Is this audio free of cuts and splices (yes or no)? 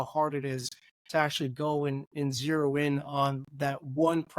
yes